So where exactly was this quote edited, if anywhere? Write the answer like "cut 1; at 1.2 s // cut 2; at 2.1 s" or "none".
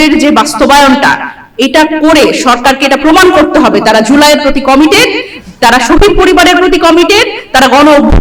none